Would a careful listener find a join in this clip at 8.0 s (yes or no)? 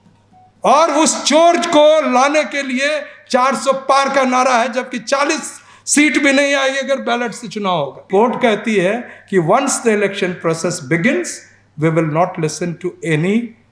yes